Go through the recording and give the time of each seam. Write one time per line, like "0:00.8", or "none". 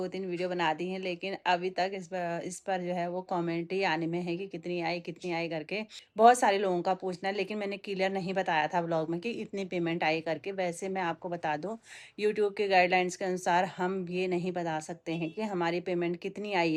none